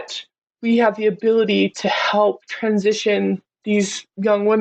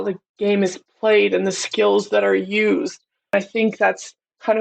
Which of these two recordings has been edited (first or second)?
second